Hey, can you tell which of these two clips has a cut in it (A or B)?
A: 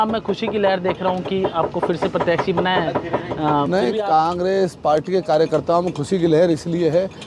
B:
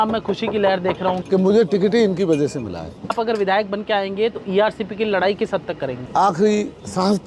B